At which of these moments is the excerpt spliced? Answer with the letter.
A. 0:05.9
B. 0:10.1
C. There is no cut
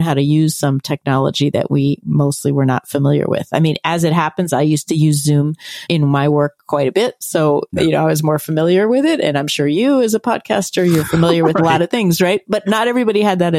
A